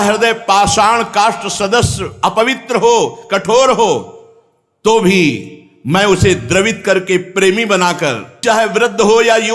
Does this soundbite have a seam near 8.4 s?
yes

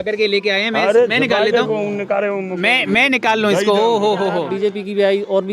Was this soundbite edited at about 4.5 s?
yes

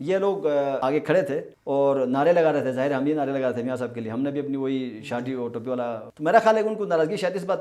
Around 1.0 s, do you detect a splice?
yes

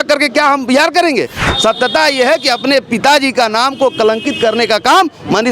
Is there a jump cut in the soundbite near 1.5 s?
yes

